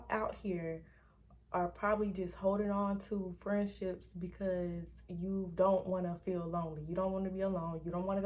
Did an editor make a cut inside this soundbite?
no; 0 cuts

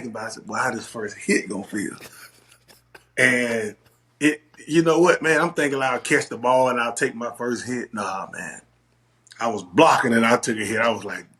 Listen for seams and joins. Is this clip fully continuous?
yes; 0 cuts

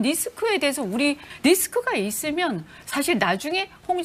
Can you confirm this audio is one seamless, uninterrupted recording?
no; 1 cut; at 1.3 s

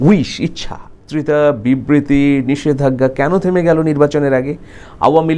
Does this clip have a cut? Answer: yes; 1 cut; at 1.0 s

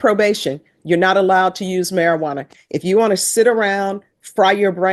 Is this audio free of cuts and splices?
yes; 0 cuts

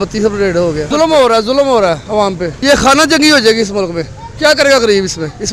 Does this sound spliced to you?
no; 0 cuts

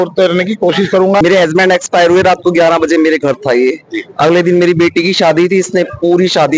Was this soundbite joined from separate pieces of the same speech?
yes; 1 cut; at 1.2 s

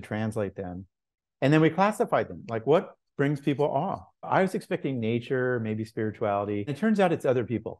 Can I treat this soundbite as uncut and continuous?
no; 2 cuts; at 4.1 s, 6.8 s

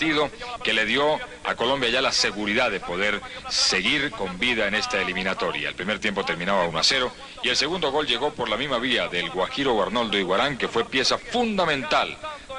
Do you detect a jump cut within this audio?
no; 0 cuts

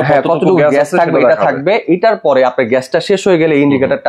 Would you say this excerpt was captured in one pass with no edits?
yes; 0 cuts

